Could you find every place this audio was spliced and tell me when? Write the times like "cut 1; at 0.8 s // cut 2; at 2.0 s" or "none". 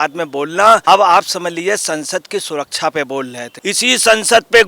cut 1; at 0.8 s // cut 2; at 3.4 s